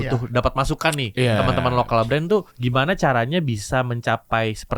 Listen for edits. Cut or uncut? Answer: cut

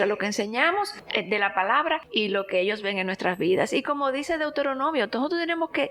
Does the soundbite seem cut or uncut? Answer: cut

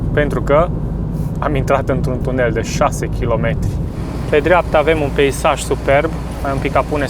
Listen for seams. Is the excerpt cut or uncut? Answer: cut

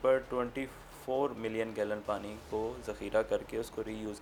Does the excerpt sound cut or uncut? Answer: uncut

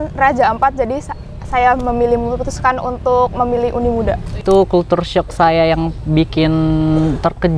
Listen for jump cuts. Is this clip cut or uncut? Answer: cut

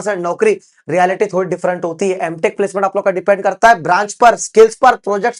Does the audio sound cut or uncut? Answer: uncut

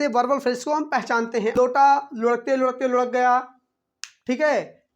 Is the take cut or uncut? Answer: cut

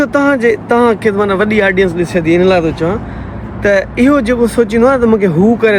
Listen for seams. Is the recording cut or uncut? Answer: uncut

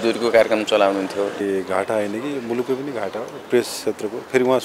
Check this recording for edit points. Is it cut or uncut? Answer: cut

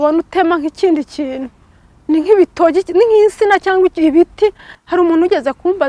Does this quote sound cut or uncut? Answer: cut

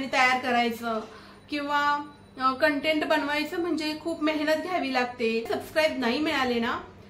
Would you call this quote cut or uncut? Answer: cut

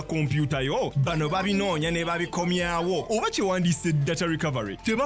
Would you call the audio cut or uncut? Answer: uncut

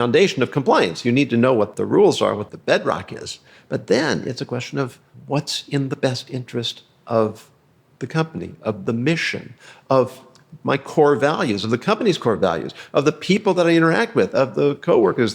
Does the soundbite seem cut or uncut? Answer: cut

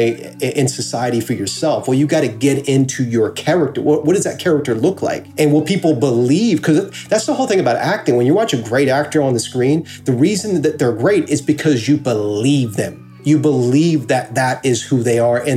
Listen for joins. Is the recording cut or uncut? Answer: cut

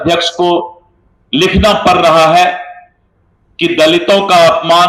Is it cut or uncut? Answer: uncut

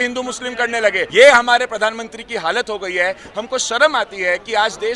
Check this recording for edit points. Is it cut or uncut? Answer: cut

